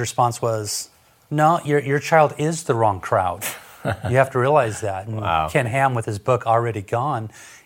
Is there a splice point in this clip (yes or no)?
no